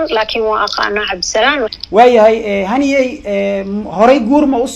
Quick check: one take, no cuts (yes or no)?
no